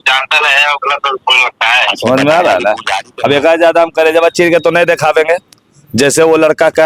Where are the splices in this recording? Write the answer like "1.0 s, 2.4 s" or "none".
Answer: none

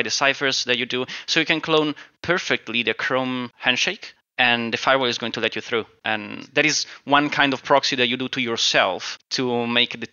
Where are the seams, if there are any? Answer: 3.7 s, 6.0 s, 9.2 s

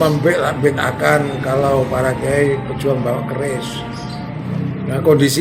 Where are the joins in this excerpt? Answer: 4.4 s

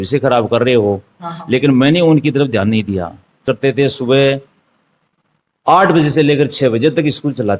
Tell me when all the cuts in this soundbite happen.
3.5 s

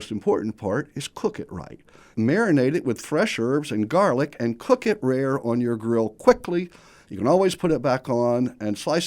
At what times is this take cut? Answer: 2.1 s

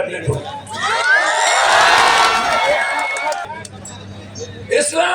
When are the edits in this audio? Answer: 3.4 s

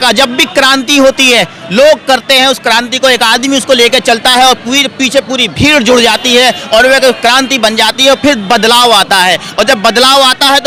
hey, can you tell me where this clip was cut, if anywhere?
none

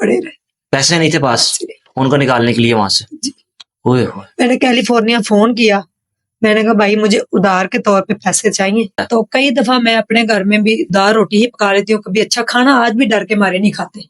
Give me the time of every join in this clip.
9.0 s

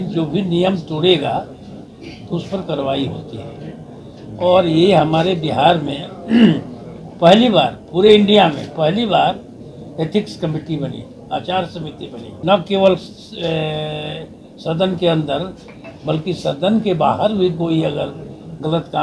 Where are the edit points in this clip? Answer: 12.3 s

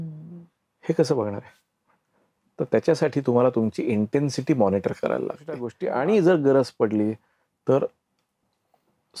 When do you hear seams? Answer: 5.7 s

